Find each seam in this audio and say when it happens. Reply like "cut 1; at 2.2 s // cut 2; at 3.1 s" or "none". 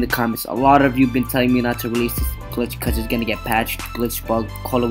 cut 1; at 2.4 s